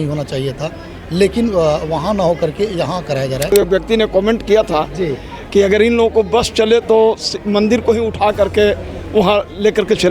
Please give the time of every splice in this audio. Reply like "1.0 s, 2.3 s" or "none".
3.5 s